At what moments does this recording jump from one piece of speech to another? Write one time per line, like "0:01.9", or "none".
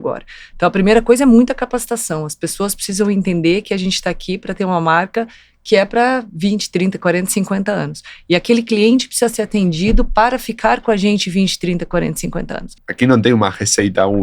0:12.8